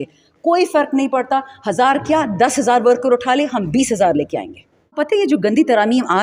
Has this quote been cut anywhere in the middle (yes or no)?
yes